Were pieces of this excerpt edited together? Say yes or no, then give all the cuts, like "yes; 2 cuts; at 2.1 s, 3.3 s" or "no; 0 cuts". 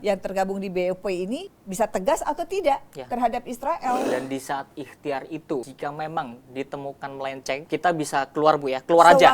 yes; 4 cuts; at 1.6 s, 4.0 s, 5.7 s, 7.6 s